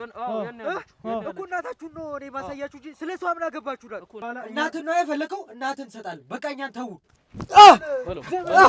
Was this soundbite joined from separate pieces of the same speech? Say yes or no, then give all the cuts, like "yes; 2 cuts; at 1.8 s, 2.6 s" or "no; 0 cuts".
yes; 1 cut; at 4.1 s